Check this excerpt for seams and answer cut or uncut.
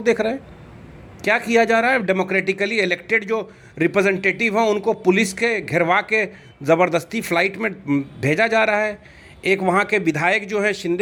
uncut